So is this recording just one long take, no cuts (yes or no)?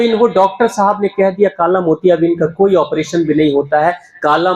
yes